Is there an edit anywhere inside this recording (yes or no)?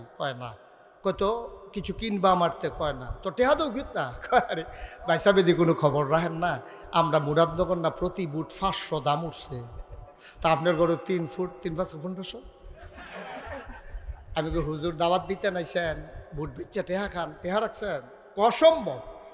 no